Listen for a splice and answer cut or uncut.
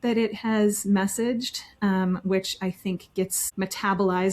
cut